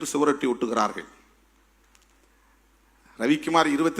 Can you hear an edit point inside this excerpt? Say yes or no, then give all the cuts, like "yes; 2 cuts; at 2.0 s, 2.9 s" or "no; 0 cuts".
no; 0 cuts